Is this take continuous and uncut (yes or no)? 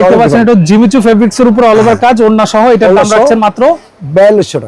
yes